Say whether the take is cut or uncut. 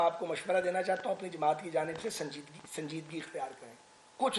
uncut